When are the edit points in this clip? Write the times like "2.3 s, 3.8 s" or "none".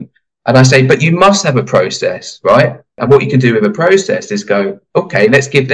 3.0 s